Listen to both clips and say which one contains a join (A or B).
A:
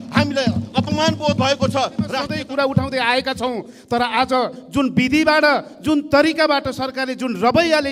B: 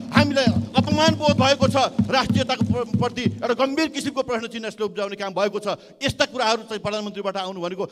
A